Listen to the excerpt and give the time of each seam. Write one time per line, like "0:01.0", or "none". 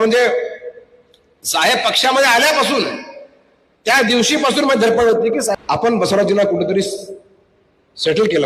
0:05.6